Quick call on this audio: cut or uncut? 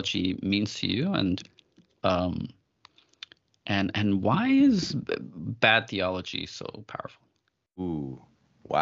cut